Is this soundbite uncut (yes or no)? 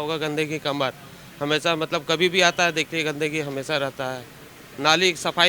yes